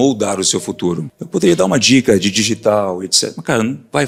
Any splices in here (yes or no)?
no